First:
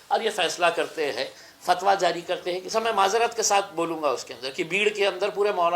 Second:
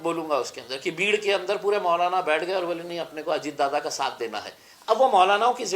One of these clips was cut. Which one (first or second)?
first